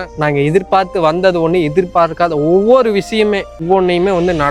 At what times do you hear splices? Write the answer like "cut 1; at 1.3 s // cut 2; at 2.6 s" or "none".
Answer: cut 1; at 3.6 s